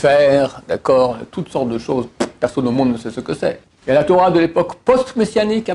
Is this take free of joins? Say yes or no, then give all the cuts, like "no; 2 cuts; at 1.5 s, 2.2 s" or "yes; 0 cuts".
no; 1 cut; at 3.7 s